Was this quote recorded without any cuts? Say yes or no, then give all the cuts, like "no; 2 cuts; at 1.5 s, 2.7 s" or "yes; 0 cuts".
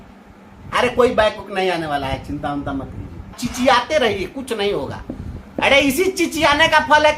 no; 1 cut; at 3.4 s